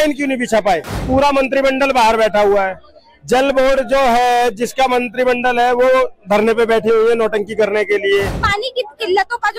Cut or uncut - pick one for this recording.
cut